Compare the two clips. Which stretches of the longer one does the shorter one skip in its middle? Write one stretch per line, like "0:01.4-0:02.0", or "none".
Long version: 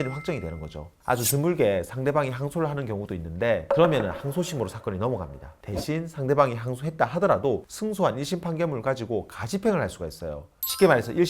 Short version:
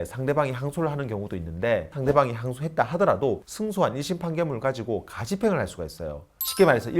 0:03.6-0:06.1